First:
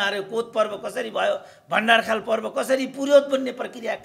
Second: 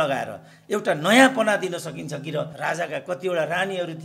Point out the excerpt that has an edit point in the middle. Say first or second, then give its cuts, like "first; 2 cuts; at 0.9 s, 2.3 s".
second; 1 cut; at 2.5 s